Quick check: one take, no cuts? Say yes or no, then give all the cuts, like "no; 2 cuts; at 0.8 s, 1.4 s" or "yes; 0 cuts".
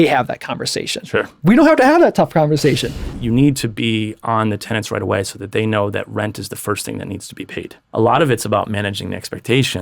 no; 2 cuts; at 3.1 s, 7.8 s